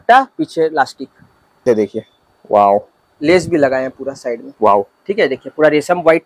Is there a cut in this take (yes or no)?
yes